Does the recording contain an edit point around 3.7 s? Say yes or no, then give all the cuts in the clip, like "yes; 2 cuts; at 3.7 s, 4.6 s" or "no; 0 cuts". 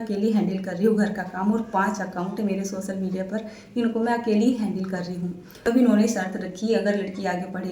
no; 1 cut; at 5.6 s